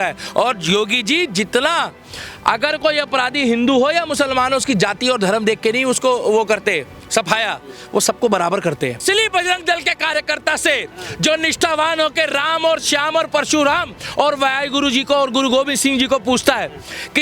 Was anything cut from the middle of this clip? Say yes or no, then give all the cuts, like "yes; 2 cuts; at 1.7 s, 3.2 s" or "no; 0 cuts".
yes; 1 cut; at 9.0 s